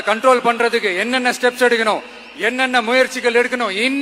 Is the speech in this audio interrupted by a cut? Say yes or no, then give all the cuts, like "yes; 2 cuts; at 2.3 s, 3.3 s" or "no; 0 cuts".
no; 0 cuts